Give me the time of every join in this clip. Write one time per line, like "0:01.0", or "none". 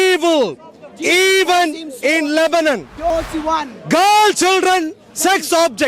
0:03.1